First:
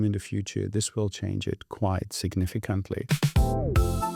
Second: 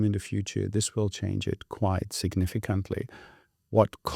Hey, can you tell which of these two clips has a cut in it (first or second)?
first